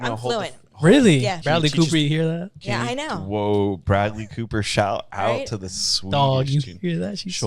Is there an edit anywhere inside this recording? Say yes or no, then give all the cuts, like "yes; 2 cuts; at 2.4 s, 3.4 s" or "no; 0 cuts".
yes; 1 cut; at 1.4 s